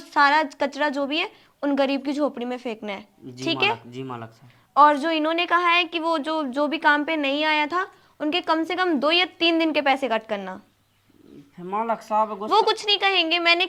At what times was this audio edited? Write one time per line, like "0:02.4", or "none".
none